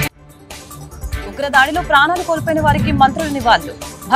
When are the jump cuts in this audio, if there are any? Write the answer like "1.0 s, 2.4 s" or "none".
0.9 s